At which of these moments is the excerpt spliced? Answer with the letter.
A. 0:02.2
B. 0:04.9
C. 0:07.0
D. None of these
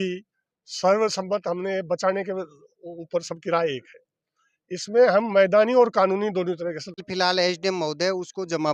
C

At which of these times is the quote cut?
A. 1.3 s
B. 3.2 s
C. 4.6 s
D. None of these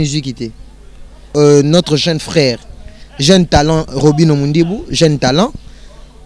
A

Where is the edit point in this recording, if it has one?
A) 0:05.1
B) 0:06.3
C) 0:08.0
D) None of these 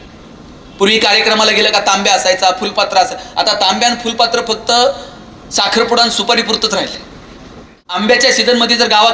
C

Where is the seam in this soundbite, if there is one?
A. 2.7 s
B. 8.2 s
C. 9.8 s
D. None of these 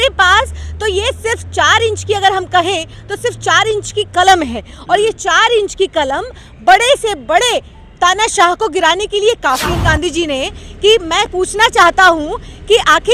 C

